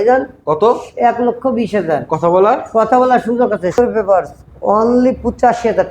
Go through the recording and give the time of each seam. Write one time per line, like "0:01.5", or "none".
0:03.8

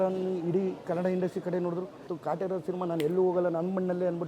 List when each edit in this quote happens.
0:02.1

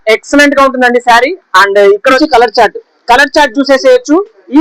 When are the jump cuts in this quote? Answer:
0:02.2

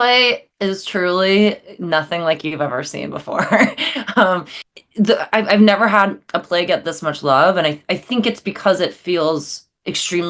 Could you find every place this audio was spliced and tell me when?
0:04.6

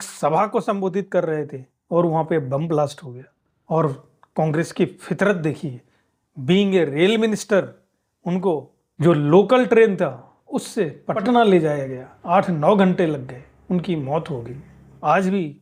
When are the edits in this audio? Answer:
none

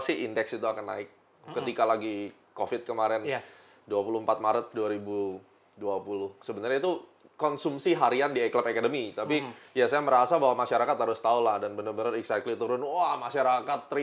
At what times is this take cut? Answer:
none

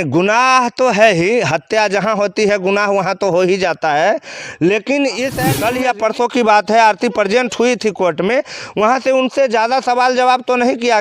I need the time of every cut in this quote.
0:05.4

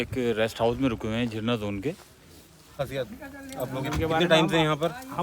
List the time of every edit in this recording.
0:02.8

